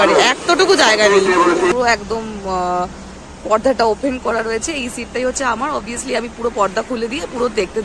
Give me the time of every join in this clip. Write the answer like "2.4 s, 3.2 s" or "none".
1.7 s